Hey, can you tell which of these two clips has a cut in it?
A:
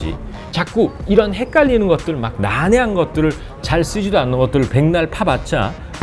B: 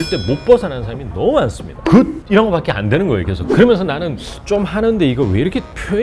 B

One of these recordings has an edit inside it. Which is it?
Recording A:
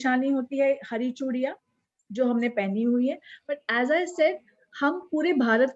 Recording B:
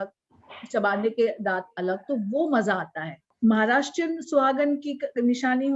B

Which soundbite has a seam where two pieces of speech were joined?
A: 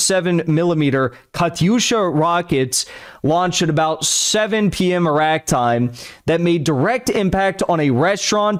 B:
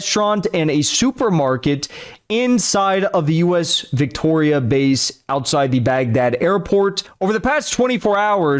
B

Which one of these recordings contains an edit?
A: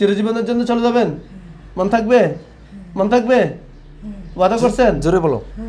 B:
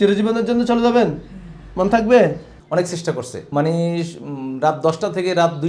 B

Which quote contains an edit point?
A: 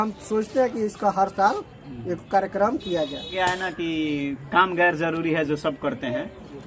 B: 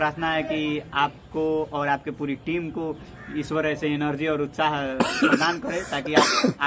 A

